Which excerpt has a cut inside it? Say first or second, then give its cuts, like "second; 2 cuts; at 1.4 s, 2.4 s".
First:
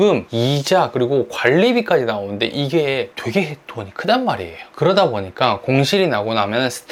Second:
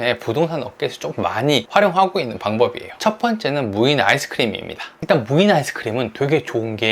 second; 1 cut; at 2.9 s